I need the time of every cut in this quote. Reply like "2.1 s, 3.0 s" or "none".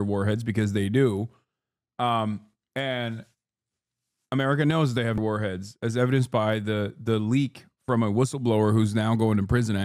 5.2 s